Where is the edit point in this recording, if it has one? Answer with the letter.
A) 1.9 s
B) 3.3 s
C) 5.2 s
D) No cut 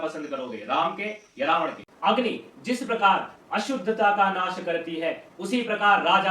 A